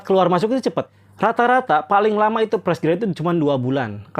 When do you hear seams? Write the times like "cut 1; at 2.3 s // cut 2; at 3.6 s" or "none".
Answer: cut 1; at 1.0 s